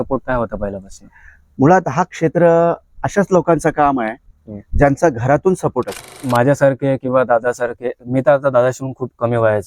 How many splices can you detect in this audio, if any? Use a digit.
1